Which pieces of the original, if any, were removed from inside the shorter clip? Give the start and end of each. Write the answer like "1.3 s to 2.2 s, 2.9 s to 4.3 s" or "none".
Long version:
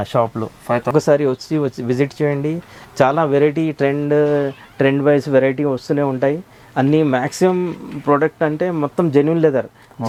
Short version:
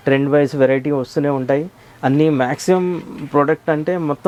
none